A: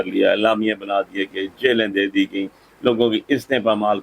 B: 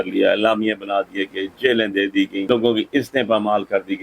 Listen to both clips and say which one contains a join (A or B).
B